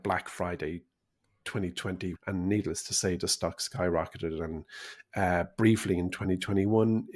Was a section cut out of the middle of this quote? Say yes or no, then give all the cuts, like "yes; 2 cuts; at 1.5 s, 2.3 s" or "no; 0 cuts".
yes; 1 cut; at 2.2 s